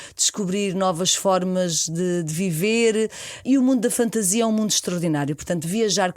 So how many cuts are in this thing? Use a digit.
1